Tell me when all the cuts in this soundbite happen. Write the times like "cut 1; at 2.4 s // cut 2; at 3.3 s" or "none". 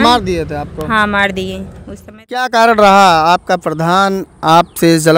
cut 1; at 2.4 s